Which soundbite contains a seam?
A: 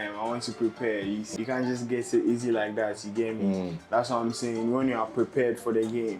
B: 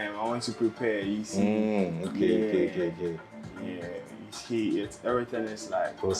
A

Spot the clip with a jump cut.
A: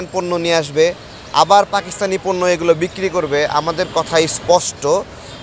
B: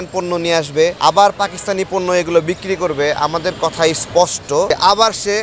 B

